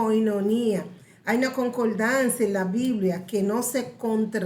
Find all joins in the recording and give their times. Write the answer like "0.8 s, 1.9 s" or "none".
none